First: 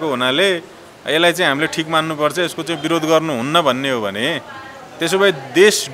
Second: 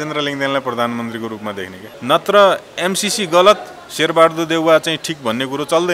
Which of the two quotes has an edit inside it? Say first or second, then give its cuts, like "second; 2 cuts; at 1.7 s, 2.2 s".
second; 1 cut; at 1.8 s